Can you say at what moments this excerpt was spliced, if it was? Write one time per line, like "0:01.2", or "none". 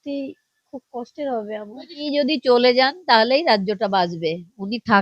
0:02.0

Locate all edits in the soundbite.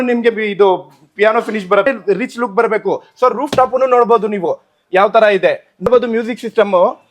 0:01.9
0:05.9

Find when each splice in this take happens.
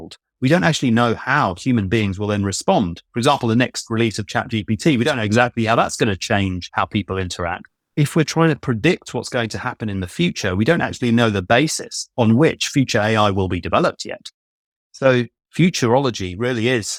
none

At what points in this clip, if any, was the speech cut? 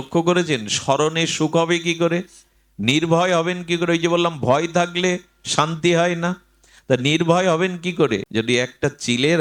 0:08.3

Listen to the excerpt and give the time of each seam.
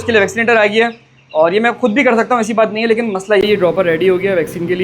0:03.4

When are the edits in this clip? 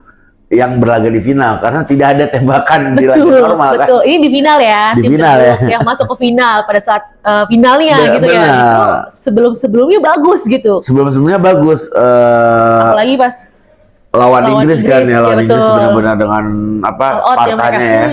none

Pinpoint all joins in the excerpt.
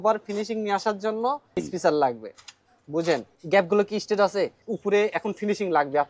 0:01.5
0:03.3
0:04.6

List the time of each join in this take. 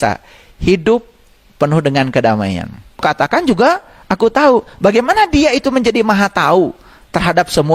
0:03.0

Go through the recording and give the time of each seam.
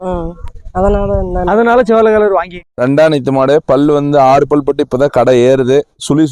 0:02.7

